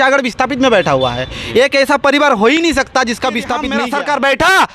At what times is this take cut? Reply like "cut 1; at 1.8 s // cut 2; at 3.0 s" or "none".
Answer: cut 1; at 3.7 s